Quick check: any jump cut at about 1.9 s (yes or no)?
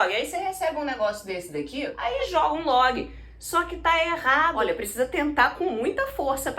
yes